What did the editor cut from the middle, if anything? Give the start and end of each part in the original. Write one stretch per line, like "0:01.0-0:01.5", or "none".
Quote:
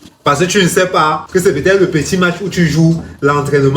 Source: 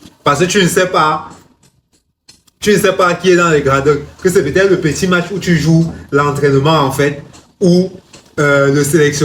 0:01.2-0:04.1